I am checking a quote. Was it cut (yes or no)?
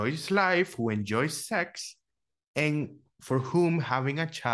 no